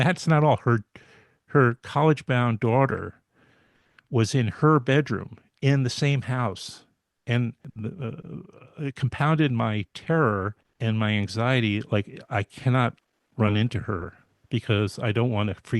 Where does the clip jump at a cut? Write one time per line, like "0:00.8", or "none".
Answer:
0:07.7
0:10.6

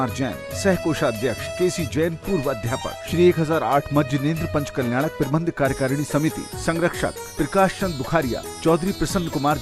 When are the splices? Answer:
0:01.5
0:03.0

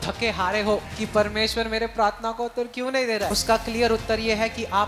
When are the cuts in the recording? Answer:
0:00.9
0:03.4

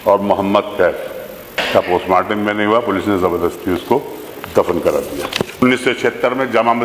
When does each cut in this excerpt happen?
0:01.6
0:05.6

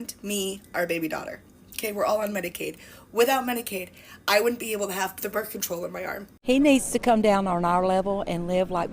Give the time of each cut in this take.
0:06.3

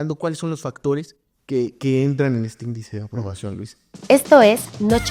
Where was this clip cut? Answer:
0:04.0

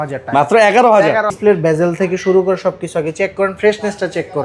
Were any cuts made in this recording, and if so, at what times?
0:01.4

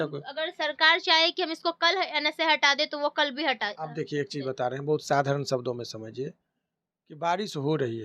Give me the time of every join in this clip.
none

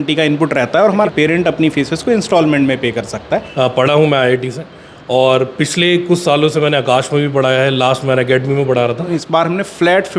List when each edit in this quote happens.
0:01.1
0:03.5
0:09.2

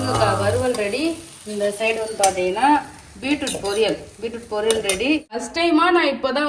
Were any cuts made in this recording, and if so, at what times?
0:05.5

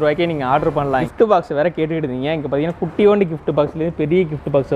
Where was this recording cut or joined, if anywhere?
0:01.1

